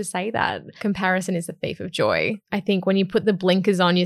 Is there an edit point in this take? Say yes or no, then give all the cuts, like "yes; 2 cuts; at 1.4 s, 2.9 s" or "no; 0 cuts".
yes; 2 cuts; at 0.8 s, 2.5 s